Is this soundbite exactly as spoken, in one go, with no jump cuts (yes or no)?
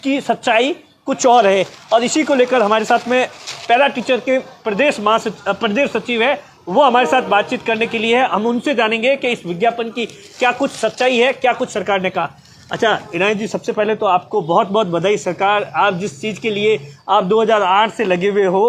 yes